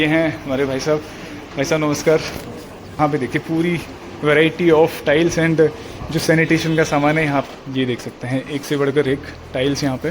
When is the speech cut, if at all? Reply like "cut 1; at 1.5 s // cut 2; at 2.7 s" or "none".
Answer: cut 1; at 3.0 s // cut 2; at 7.4 s